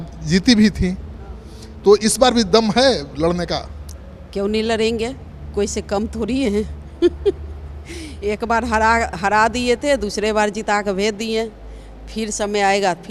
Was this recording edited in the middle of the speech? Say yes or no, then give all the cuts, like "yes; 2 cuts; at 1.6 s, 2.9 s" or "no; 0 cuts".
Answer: no; 0 cuts